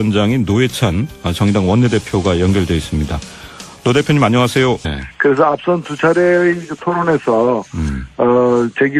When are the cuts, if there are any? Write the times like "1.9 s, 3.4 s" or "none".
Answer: none

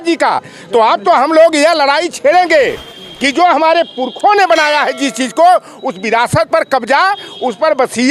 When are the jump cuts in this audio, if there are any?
none

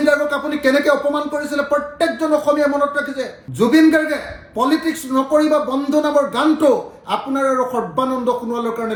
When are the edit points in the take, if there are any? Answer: none

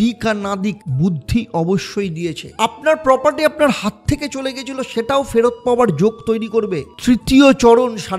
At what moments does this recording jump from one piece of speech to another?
2.4 s, 6.9 s

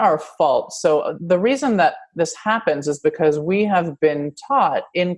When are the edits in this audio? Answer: 1.2 s

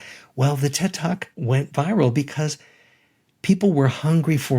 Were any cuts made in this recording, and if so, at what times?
1.3 s

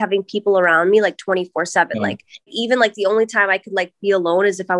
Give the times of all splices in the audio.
2.5 s

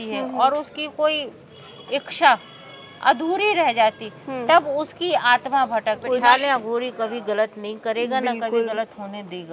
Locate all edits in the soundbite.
6.0 s

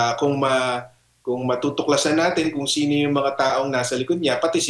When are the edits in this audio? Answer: none

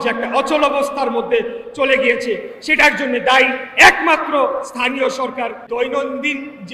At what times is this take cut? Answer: 5.6 s

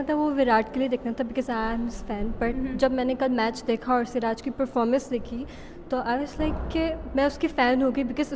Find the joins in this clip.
none

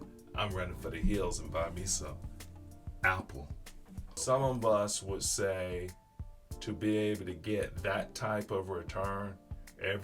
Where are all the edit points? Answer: 4.2 s

